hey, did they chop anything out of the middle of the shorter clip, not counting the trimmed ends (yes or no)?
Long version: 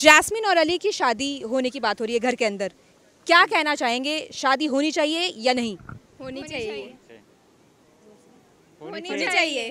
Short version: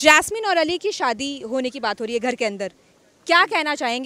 no